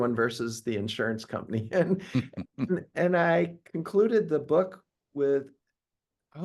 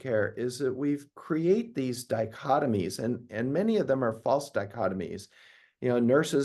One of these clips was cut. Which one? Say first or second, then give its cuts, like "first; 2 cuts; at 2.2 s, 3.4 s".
first; 1 cut; at 2.9 s